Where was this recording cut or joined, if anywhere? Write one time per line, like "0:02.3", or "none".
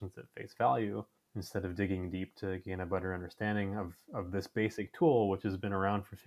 none